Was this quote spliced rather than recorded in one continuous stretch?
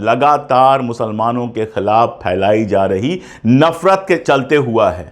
yes; 1 cut; at 4.2 s

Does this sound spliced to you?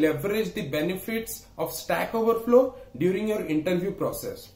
no; 0 cuts

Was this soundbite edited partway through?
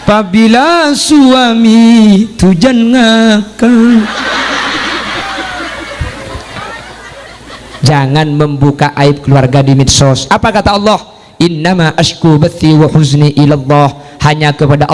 yes; 1 cut; at 7.2 s

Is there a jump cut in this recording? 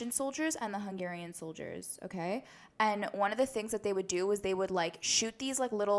no; 0 cuts

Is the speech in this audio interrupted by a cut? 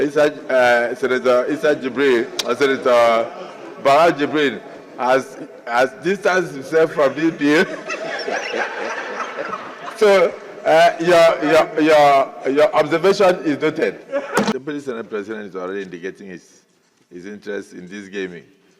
yes; 1 cut; at 14.5 s

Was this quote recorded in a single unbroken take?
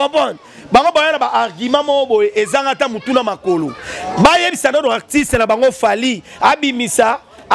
yes; 0 cuts

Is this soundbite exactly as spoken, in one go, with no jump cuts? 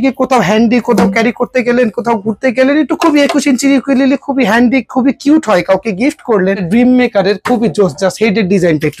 no; 1 cut; at 6.6 s

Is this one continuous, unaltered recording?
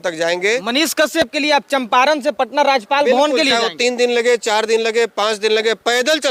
yes; 0 cuts

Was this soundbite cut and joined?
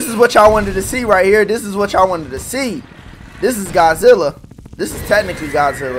no; 0 cuts

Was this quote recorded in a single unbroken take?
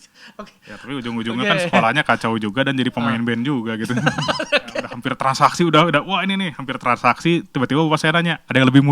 no; 1 cut; at 5.0 s

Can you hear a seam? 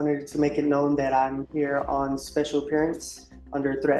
no; 0 cuts

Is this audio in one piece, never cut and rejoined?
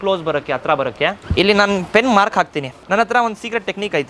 no; 1 cut; at 2.8 s

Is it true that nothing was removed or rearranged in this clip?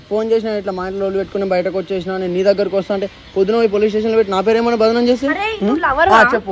yes; 0 cuts

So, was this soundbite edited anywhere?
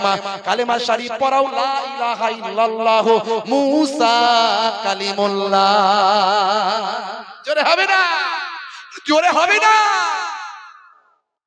no; 0 cuts

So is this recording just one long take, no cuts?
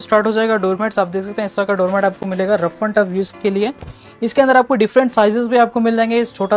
yes; 0 cuts

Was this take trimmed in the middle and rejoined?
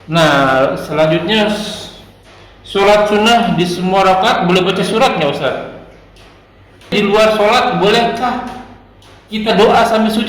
yes; 1 cut; at 6.9 s

